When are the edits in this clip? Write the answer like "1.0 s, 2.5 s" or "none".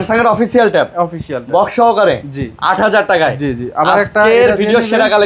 none